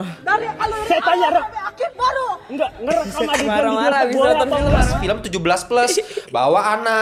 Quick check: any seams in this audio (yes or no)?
yes